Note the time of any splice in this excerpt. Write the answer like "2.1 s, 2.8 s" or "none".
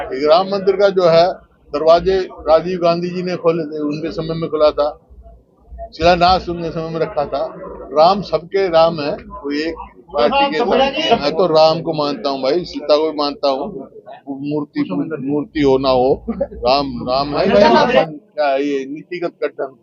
11.2 s, 18.0 s